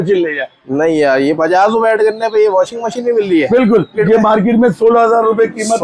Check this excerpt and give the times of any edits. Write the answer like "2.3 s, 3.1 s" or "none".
4.0 s